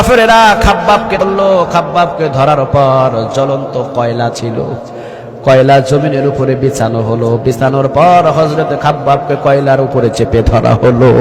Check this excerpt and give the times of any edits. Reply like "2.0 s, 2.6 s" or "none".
1.2 s